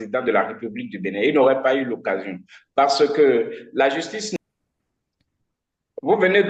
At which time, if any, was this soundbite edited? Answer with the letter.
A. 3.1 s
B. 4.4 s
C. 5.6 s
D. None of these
B